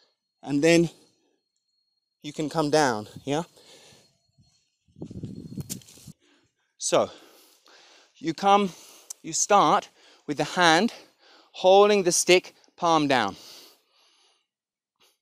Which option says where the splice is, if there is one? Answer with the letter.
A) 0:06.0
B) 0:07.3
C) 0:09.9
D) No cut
A